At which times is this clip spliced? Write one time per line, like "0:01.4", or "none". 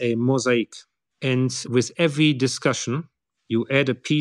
none